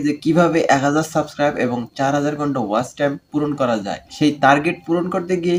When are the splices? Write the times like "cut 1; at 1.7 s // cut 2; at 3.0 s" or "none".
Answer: none